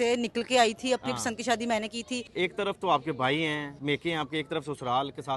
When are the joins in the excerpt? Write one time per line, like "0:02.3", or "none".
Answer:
0:02.3
0:03.7